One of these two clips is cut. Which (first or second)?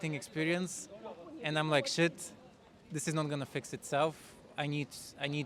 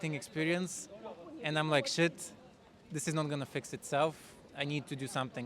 second